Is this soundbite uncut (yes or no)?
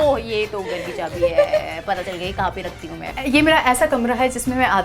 no